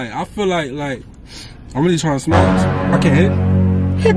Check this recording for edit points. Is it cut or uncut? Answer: uncut